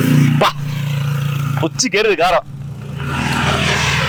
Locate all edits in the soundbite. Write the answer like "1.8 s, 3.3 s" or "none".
none